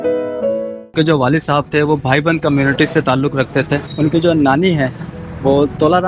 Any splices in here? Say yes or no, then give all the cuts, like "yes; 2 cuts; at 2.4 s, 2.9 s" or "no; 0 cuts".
yes; 2 cuts; at 0.9 s, 3.9 s